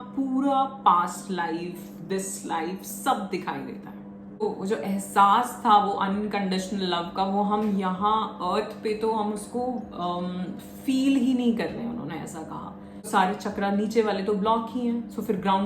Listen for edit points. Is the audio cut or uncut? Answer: cut